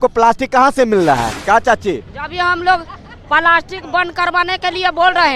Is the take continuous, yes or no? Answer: no